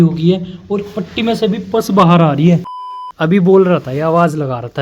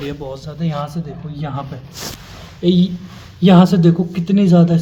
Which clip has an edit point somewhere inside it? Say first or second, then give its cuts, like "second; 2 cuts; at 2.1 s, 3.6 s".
first; 1 cut; at 2.8 s